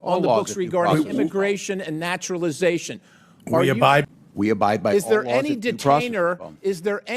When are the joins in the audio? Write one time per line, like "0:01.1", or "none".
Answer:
0:04.0